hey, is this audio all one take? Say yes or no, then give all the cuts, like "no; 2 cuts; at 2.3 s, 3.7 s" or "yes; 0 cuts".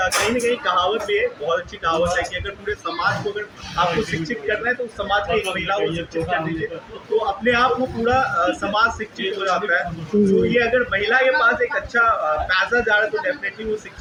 yes; 0 cuts